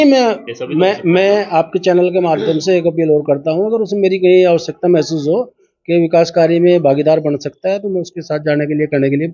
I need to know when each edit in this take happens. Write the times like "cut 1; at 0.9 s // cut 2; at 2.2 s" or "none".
none